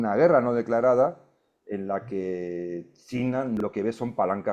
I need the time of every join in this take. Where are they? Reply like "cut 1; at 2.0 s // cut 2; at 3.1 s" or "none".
cut 1; at 3.6 s